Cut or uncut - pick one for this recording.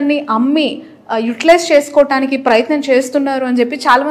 uncut